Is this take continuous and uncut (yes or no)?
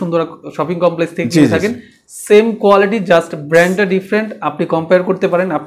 yes